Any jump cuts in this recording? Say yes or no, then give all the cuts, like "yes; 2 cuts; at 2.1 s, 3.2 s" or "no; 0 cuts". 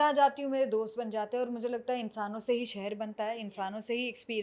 no; 0 cuts